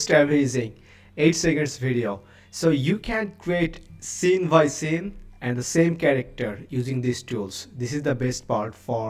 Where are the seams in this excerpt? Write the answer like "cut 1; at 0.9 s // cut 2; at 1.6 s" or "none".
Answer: none